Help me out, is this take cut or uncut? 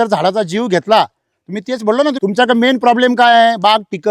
cut